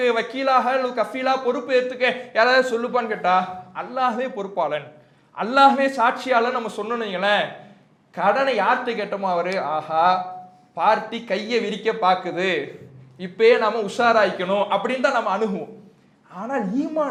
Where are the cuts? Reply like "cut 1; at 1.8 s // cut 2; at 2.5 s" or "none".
none